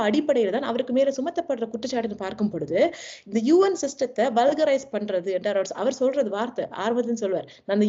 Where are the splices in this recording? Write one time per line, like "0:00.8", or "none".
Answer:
none